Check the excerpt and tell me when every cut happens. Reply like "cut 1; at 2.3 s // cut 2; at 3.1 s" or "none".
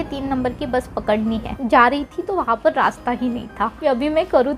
cut 1; at 1.5 s // cut 2; at 3.6 s